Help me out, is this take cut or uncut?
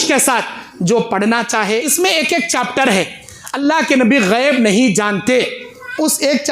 cut